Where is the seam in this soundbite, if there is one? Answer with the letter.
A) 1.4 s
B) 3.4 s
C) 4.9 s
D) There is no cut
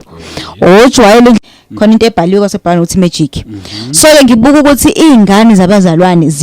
A